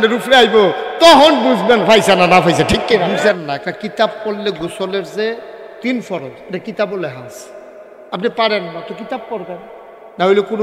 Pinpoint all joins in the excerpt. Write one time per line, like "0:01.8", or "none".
0:03.2

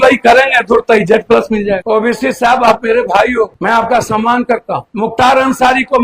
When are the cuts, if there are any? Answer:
0:01.8

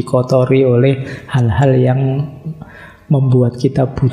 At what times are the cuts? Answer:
none

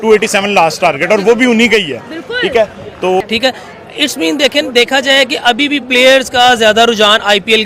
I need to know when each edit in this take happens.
0:03.2

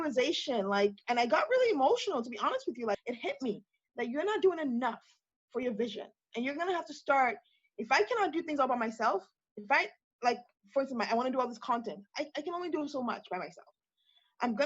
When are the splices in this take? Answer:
0:03.0

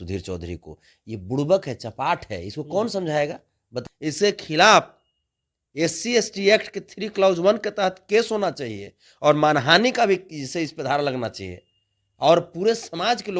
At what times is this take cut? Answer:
0:03.7

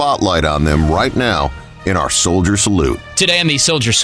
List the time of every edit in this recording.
0:03.1

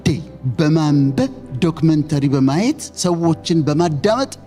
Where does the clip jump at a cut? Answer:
none

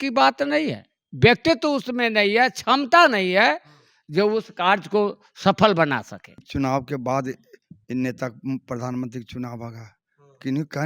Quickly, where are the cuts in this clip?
0:06.5

